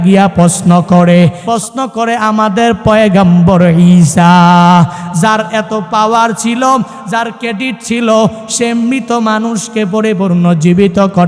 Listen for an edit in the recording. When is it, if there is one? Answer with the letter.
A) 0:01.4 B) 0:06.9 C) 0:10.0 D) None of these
A